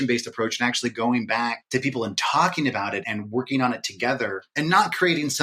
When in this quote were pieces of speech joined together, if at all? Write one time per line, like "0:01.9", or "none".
0:01.6
0:03.0
0:04.4